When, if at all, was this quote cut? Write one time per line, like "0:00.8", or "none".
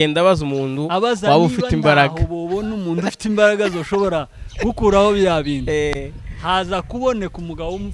none